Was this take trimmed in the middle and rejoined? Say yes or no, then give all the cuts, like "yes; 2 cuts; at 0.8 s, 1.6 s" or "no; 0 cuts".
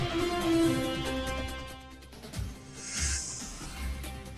yes; 1 cut; at 3.5 s